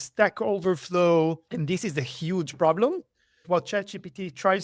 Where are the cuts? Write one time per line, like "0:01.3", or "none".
0:01.5
0:03.4